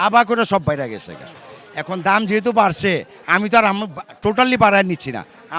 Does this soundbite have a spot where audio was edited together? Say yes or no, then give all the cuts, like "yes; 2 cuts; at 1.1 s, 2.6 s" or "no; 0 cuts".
no; 0 cuts